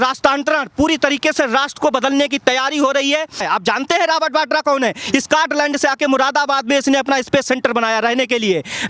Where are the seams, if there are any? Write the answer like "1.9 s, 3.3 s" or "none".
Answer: 3.4 s